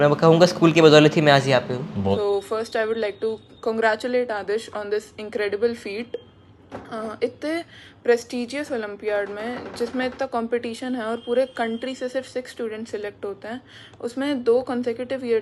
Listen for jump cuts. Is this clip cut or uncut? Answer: cut